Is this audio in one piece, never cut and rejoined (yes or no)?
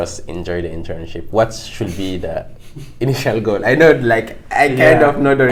yes